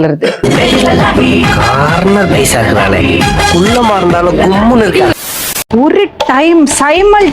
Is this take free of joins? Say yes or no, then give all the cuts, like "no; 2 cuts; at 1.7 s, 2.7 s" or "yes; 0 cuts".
no; 1 cut; at 5.3 s